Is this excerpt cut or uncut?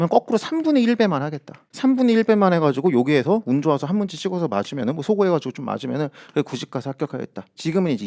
uncut